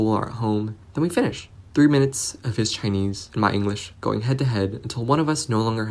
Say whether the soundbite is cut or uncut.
cut